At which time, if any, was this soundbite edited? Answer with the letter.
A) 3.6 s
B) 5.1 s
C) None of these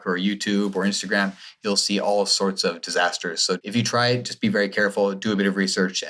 A